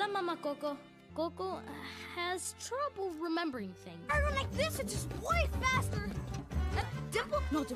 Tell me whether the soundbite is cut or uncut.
cut